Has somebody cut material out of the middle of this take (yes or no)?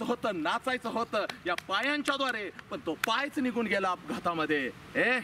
yes